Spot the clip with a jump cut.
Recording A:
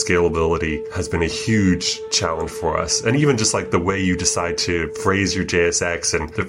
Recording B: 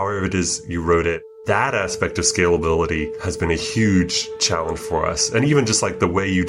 B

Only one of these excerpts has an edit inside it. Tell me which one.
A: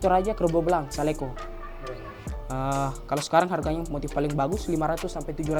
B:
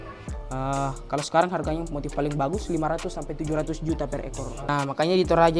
B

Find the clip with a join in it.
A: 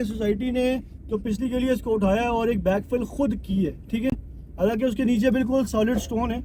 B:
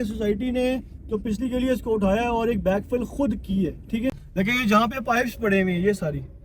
B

